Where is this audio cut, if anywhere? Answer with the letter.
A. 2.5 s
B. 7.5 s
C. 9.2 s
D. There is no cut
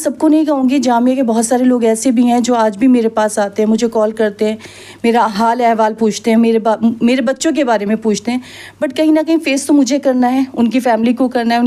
D